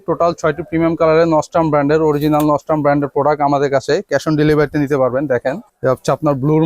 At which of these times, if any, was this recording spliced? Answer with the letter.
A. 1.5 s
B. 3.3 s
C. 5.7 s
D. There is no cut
C